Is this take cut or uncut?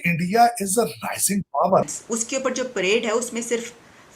cut